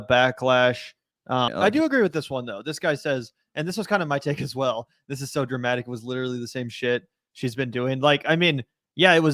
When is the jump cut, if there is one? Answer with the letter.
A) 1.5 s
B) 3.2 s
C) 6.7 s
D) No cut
A